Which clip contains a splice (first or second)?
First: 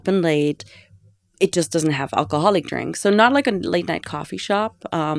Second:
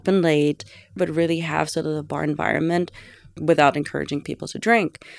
second